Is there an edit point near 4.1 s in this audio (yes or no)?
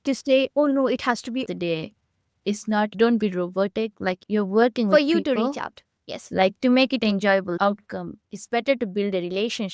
no